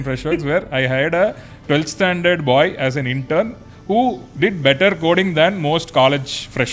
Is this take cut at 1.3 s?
no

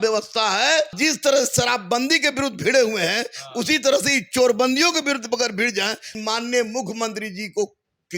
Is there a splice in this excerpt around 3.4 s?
no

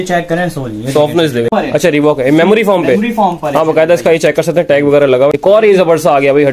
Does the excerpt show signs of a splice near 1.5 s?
yes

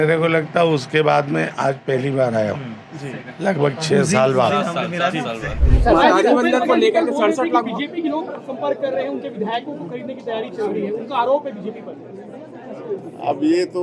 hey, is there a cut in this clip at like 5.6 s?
yes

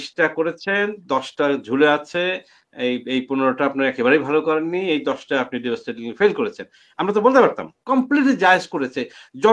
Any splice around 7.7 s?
yes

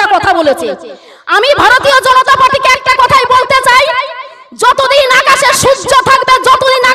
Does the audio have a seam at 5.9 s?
no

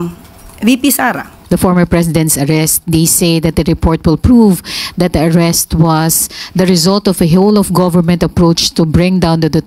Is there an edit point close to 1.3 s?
yes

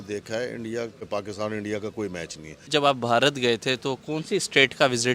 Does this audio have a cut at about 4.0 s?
no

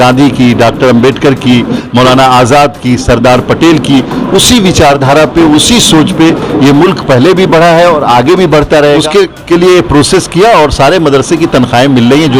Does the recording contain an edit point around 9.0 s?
yes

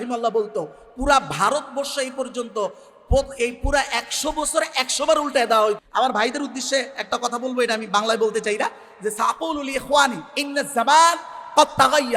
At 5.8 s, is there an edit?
yes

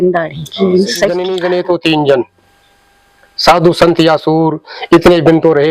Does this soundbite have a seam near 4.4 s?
no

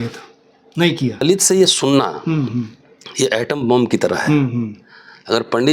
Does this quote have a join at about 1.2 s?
yes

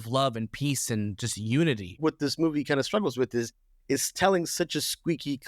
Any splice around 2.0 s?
yes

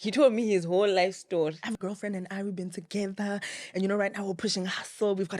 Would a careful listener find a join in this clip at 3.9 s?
no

